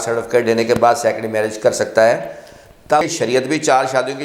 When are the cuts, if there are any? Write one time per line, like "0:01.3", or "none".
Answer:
0:03.0